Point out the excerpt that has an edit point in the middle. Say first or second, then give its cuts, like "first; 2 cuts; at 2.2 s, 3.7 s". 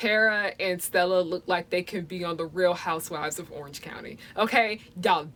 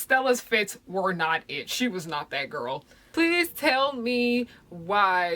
second; 1 cut; at 3.0 s